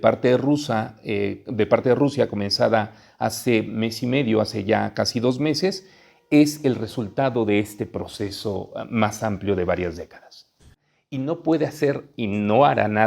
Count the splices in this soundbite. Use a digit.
1